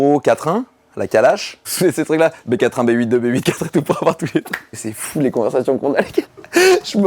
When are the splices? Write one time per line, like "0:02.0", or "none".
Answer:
0:01.7
0:04.8